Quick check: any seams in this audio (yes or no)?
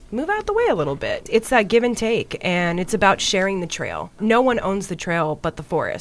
yes